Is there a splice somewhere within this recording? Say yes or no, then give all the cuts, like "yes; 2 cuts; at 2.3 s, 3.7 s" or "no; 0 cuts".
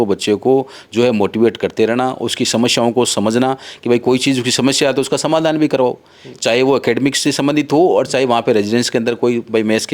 no; 0 cuts